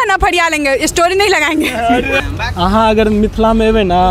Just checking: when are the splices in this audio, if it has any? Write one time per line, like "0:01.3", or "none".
0:02.2